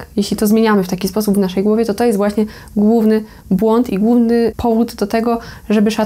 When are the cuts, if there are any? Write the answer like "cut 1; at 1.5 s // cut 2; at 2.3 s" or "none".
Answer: cut 1; at 4.6 s